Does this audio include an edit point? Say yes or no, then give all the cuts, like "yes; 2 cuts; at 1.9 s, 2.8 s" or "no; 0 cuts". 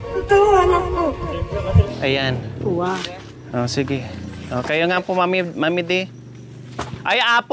yes; 1 cut; at 1.9 s